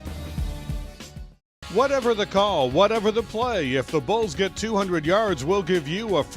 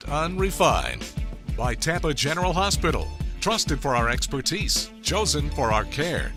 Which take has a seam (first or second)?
first